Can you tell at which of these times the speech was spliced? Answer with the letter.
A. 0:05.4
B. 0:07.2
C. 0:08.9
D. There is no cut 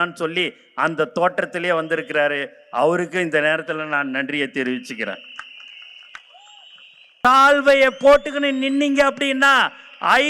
B